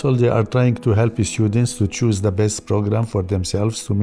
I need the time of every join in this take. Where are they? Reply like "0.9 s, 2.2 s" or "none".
none